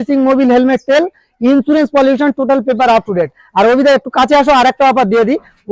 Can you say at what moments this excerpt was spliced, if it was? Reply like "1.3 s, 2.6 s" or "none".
none